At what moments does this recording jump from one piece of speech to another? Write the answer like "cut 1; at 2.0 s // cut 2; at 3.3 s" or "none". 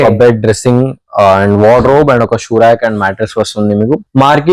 none